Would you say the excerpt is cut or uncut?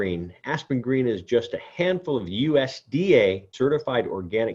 cut